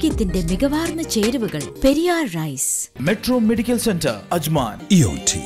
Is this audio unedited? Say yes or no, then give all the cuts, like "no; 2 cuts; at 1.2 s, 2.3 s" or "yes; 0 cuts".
no; 1 cut; at 2.9 s